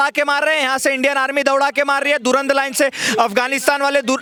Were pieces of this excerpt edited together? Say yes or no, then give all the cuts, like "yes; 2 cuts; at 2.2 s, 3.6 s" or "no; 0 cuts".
no; 0 cuts